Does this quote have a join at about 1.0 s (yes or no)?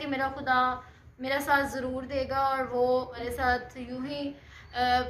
no